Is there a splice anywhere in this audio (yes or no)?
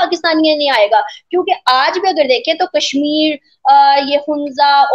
no